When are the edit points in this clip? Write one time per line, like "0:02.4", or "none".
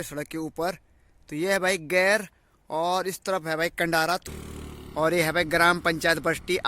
0:04.3